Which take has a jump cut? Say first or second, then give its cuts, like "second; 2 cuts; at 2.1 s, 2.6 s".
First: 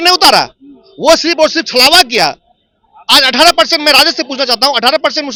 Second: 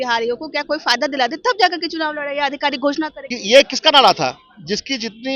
second; 1 cut; at 3.3 s